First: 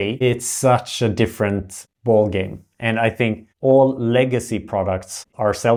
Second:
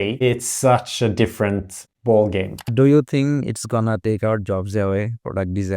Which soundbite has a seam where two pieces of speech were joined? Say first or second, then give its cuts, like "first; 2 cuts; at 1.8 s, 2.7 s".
second; 1 cut; at 2.6 s